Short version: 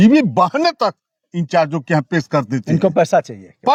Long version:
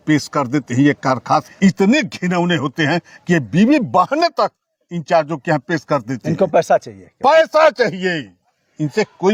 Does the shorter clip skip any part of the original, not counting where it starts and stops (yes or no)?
no